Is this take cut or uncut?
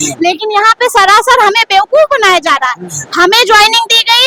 uncut